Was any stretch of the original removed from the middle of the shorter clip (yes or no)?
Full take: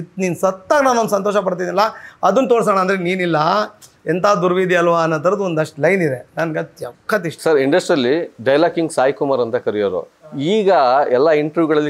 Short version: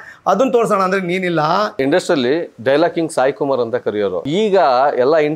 yes